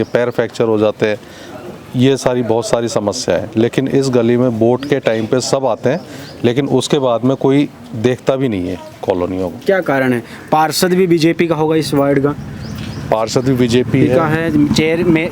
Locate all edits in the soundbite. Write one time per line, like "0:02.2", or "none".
none